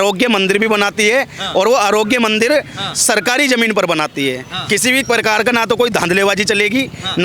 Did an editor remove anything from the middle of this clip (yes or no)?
no